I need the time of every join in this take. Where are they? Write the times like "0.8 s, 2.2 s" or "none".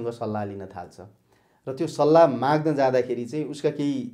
none